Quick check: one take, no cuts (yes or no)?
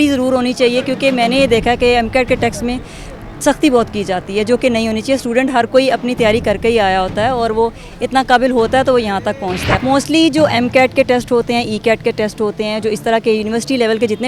no